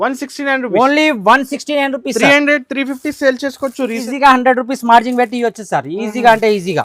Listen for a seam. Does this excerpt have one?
yes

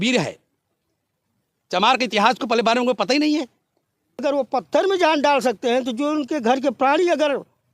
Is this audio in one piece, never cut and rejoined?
no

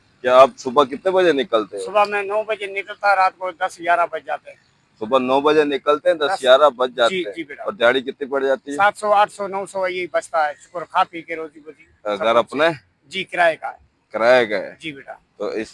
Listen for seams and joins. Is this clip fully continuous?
yes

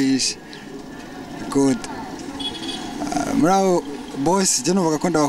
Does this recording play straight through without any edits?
no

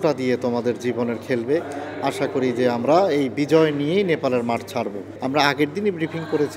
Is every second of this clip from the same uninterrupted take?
yes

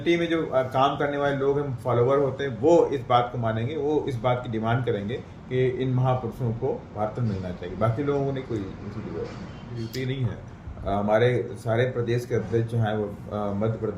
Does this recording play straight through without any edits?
no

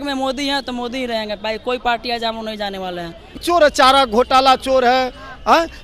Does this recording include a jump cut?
yes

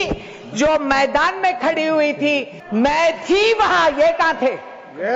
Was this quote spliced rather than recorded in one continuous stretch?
yes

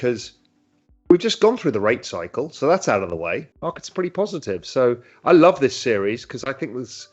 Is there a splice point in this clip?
yes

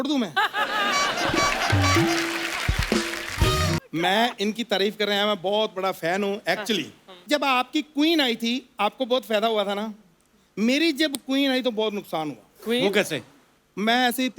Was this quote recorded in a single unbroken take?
no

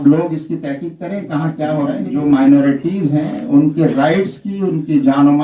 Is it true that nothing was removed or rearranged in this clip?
no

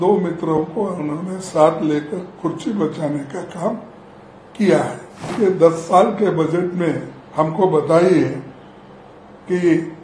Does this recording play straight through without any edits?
no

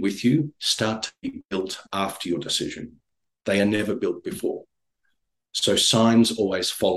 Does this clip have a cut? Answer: no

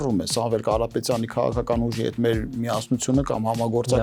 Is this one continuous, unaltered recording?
yes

